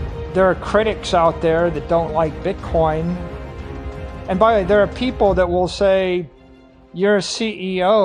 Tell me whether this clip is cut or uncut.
uncut